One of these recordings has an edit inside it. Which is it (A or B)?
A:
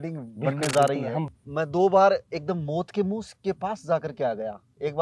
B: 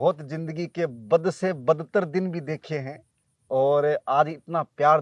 A